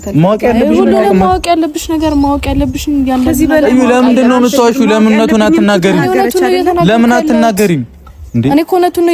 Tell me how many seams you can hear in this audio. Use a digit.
0